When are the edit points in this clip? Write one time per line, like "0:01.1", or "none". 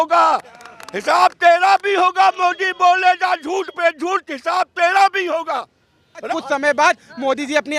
0:06.3